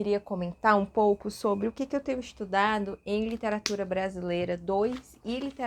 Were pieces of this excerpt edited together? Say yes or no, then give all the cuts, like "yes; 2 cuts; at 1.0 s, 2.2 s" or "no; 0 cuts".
no; 0 cuts